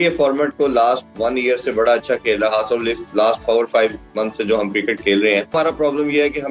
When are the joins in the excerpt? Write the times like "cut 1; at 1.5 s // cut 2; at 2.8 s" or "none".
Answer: cut 1; at 5.5 s